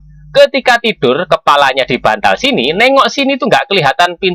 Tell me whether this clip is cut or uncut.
uncut